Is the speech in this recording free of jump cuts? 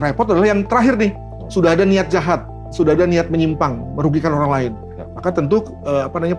yes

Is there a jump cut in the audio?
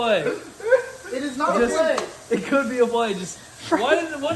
no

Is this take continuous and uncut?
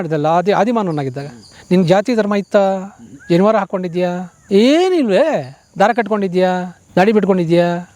yes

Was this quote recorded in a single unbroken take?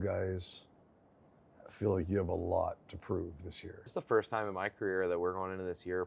no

